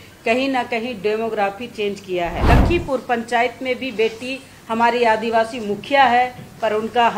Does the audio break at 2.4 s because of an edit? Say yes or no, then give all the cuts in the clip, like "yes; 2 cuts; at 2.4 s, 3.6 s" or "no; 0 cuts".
yes; 1 cut; at 2.4 s